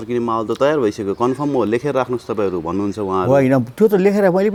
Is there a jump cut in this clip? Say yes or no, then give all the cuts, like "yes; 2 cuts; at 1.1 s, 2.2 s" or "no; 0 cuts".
no; 0 cuts